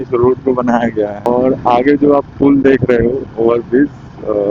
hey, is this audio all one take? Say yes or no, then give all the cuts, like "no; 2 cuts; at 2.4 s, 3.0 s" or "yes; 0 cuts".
no; 1 cut; at 1.2 s